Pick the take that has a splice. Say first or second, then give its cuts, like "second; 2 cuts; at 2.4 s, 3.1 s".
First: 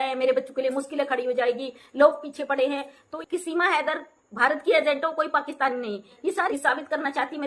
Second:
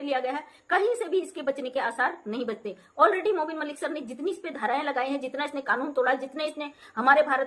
first; 2 cuts; at 3.1 s, 6.5 s